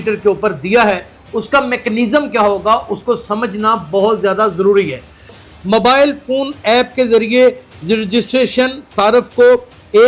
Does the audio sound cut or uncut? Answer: cut